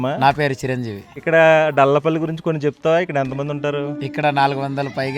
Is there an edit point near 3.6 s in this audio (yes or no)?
no